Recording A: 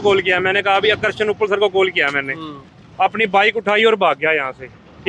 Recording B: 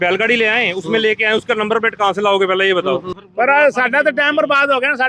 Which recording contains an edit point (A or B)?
B